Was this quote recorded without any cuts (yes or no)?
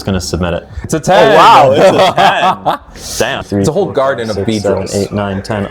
no